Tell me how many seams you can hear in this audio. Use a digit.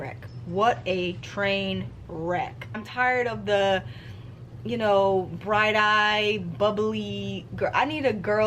1